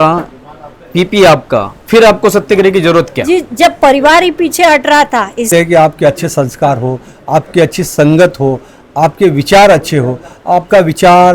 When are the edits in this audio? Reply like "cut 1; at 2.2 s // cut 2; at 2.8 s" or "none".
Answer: cut 1; at 5.5 s